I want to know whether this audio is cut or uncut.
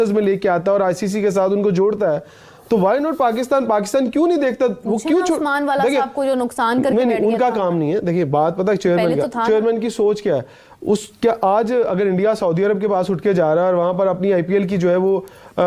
uncut